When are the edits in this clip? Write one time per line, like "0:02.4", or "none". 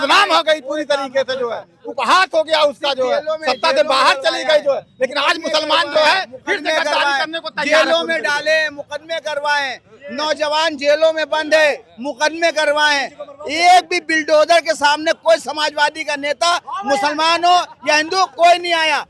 none